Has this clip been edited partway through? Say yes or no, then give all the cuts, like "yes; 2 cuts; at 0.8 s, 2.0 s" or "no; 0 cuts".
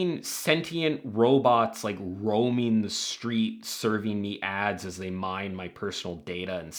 no; 0 cuts